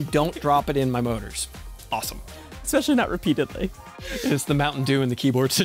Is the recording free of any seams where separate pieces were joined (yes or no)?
no